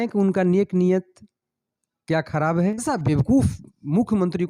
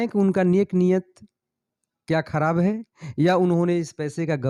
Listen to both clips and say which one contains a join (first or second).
first